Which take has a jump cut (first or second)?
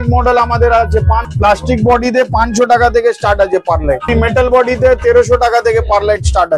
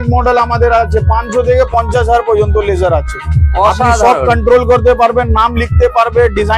first